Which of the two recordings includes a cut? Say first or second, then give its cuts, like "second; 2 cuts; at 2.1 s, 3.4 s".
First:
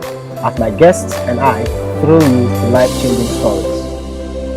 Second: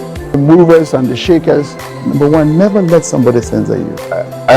first; 1 cut; at 3.6 s